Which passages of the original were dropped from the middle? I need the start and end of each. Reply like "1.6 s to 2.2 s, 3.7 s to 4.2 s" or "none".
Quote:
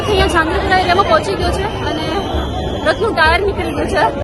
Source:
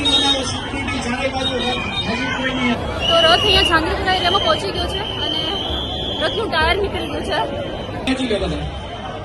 none

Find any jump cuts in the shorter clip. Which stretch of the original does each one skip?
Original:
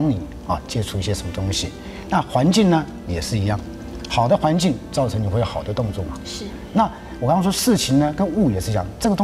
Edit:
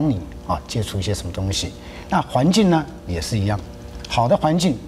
none

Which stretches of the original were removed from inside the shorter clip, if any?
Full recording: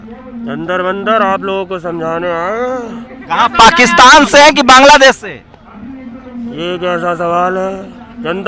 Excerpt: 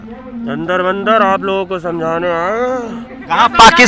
none

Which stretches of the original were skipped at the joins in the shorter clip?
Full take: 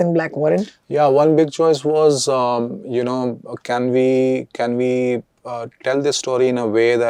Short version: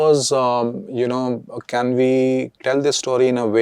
4.5 s to 5.7 s

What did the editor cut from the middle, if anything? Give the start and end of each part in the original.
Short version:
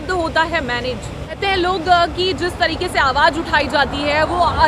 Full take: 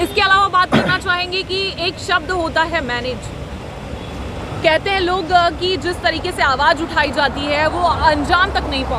3.6 s to 4.8 s

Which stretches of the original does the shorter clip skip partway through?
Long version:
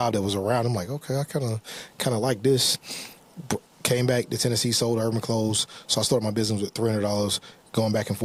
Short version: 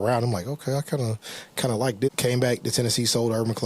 2.5 s to 3.7 s

